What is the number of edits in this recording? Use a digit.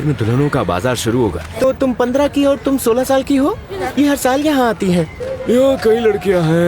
3